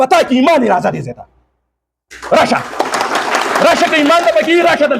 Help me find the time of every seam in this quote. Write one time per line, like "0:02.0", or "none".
0:04.1

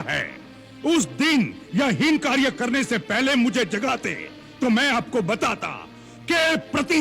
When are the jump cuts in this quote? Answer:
none

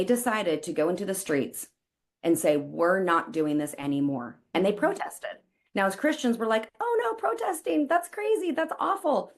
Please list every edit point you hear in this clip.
none

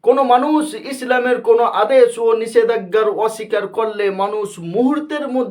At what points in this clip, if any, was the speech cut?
none

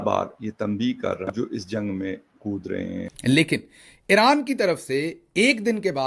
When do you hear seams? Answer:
0:01.3
0:03.1

